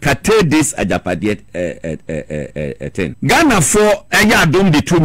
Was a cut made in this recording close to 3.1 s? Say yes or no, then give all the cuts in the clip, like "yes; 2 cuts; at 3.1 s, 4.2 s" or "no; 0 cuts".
yes; 1 cut; at 3.1 s